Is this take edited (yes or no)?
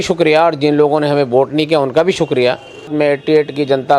yes